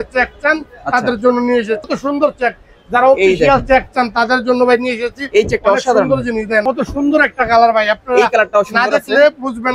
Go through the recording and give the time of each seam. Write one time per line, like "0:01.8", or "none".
0:01.9
0:06.6